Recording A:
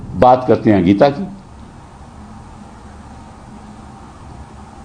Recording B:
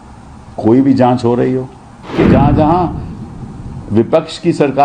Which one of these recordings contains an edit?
B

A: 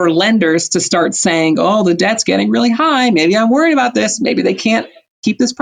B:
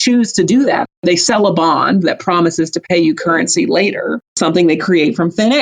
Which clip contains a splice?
B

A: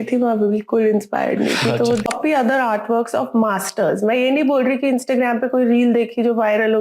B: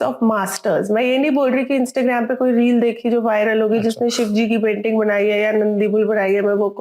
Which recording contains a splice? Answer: A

